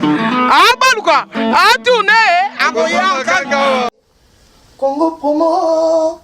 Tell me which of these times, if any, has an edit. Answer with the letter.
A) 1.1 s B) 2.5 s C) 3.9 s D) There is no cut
C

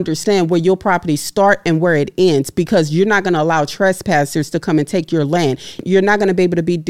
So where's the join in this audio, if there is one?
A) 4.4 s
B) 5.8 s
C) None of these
B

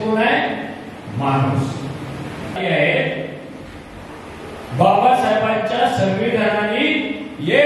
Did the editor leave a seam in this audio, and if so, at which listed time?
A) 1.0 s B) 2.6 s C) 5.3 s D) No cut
B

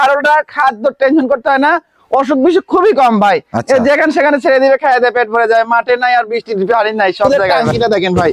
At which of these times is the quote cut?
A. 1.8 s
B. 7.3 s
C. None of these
B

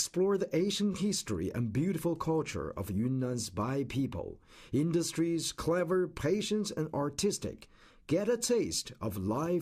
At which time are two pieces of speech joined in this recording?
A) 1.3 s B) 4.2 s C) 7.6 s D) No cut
C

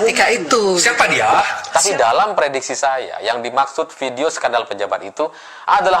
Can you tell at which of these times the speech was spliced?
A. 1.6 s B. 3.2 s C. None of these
A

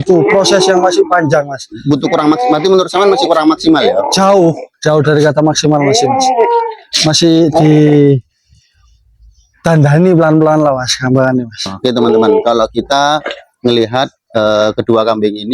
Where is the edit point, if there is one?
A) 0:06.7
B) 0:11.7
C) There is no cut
B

